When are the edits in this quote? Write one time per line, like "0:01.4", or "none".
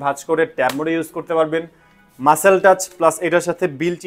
none